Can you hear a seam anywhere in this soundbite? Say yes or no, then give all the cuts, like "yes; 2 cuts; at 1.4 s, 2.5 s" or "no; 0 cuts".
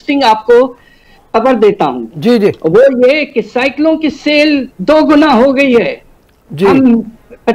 no; 0 cuts